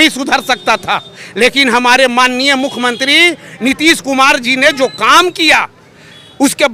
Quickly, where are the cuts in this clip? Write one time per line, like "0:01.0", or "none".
none